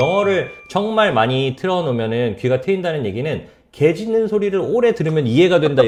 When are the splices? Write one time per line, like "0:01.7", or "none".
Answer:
none